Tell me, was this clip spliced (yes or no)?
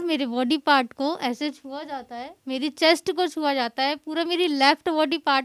no